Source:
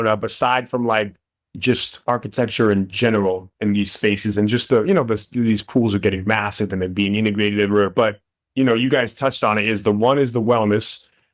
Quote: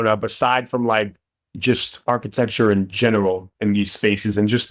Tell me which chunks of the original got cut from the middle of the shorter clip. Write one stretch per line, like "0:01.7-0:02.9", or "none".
none